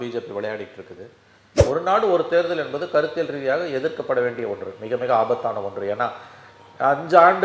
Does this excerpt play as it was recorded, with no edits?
no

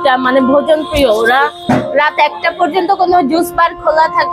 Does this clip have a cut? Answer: no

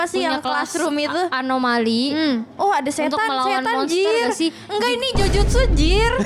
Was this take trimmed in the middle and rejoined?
yes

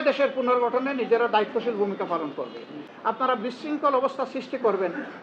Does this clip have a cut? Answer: yes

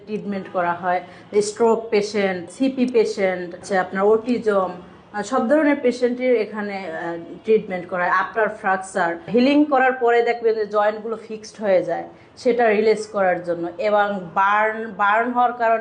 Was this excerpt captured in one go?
no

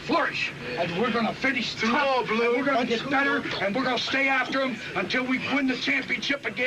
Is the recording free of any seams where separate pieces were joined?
no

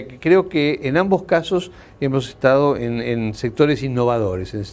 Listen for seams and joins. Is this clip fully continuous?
no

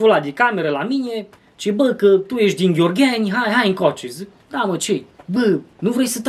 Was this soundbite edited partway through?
no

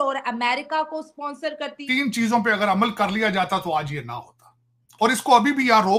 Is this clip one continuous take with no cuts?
no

